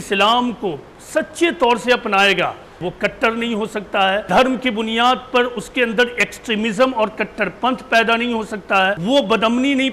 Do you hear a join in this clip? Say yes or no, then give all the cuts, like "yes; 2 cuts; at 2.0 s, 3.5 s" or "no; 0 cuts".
yes; 3 cuts; at 2.8 s, 4.2 s, 9.0 s